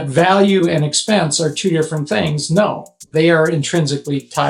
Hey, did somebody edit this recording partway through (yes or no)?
yes